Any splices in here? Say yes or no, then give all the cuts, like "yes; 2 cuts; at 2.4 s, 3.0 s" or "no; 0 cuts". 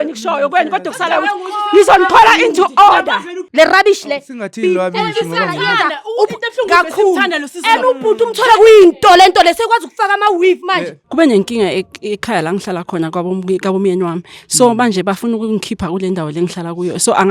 yes; 2 cuts; at 3.4 s, 10.9 s